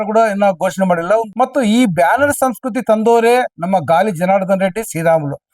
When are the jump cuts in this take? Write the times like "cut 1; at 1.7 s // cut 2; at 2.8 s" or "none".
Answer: cut 1; at 1.3 s